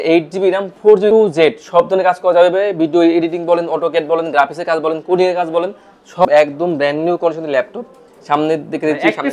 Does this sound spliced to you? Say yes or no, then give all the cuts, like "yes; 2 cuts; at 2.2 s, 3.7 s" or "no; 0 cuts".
yes; 2 cuts; at 1.1 s, 6.2 s